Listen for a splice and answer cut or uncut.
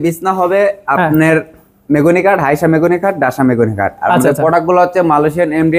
uncut